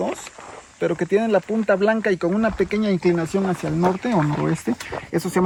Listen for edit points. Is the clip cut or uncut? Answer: uncut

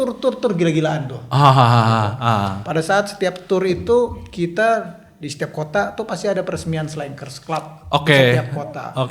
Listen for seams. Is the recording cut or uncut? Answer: uncut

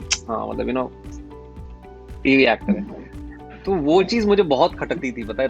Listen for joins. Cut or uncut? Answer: uncut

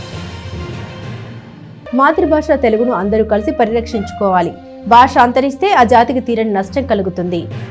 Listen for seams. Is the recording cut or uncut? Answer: uncut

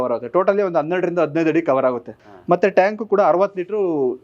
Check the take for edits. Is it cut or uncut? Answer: cut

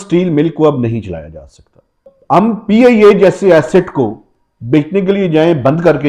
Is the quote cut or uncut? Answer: cut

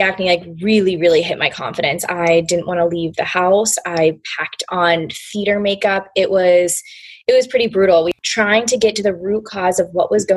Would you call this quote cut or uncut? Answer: cut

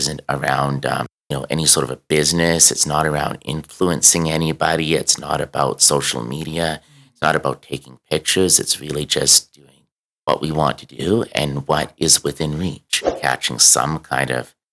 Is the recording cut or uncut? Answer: cut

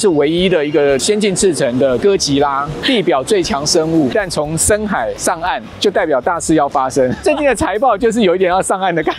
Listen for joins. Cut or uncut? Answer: cut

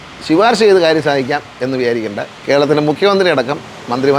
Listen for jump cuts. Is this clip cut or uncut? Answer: uncut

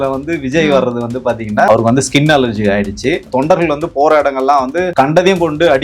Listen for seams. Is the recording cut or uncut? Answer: cut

